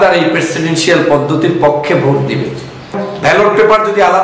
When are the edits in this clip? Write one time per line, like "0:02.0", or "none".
0:02.9